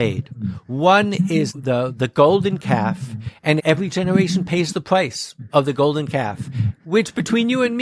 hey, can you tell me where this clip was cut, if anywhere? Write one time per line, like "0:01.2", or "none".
0:01.6
0:03.6